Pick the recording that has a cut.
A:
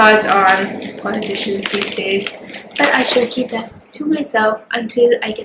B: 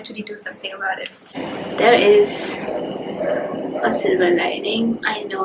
B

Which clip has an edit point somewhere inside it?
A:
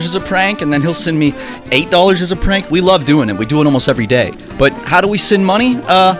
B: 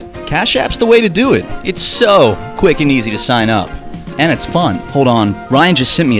B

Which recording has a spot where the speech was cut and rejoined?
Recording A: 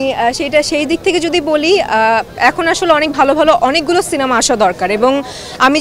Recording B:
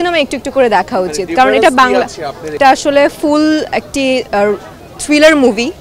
B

